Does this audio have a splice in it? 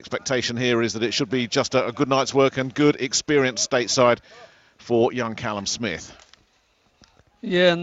yes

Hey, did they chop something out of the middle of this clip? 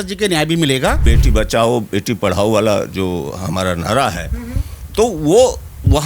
yes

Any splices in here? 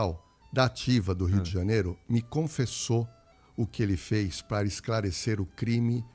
no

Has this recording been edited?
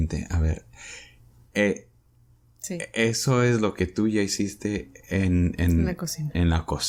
no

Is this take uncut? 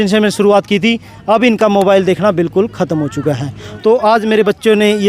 no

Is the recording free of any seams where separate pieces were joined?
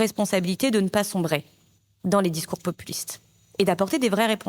yes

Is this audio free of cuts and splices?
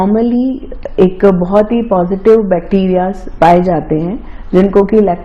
yes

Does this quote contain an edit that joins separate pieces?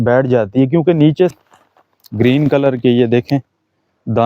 yes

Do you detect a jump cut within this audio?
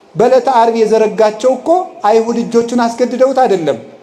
no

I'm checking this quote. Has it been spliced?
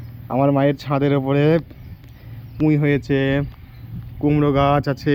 no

